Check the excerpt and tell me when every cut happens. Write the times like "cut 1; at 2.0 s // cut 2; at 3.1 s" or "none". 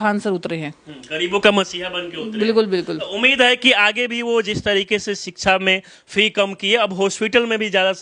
none

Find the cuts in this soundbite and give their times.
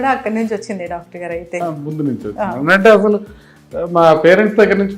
cut 1; at 1.6 s

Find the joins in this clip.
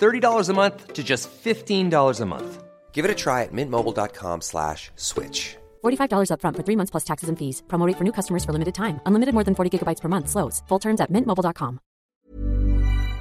cut 1; at 12.1 s

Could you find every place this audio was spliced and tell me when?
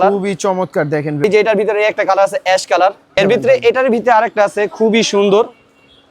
cut 1; at 1.2 s // cut 2; at 3.2 s

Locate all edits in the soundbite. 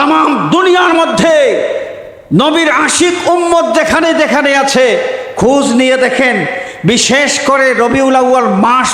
none

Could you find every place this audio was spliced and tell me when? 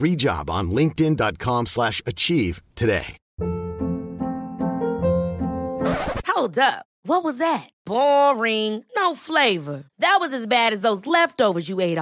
cut 1; at 3.2 s

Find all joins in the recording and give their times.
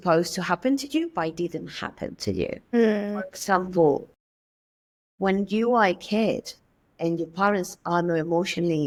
none

